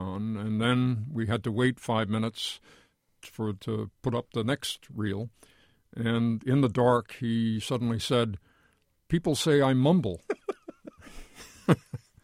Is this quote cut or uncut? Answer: uncut